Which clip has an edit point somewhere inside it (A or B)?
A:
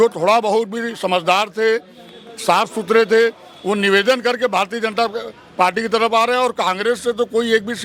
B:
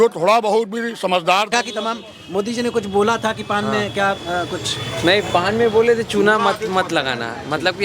B